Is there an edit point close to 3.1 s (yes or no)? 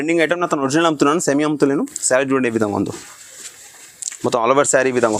no